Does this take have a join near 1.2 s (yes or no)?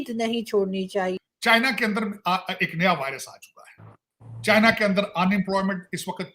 yes